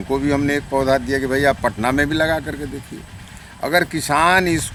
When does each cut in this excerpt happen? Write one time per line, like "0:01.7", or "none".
none